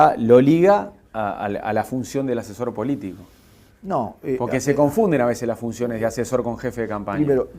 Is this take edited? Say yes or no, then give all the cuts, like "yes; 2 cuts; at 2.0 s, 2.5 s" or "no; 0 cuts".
yes; 1 cut; at 5.6 s